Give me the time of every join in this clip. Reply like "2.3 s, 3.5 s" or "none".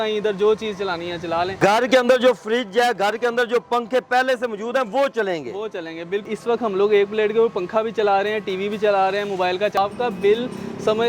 1.6 s, 6.3 s, 9.8 s